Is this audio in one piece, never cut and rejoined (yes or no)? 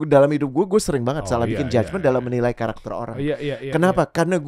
yes